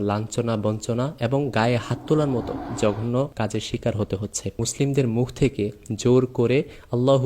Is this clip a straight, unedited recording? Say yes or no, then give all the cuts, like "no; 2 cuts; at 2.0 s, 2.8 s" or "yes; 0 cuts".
no; 3 cuts; at 2.6 s, 3.3 s, 4.6 s